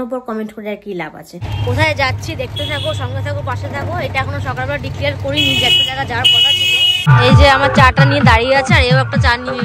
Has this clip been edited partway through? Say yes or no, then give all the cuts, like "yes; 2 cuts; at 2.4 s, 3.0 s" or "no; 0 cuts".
yes; 2 cuts; at 1.6 s, 6.9 s